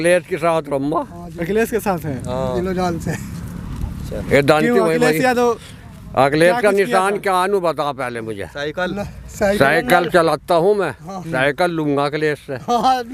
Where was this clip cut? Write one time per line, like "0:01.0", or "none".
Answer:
none